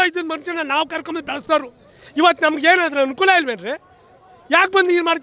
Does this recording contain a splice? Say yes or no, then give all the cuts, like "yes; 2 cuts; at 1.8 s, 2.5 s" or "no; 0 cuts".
no; 0 cuts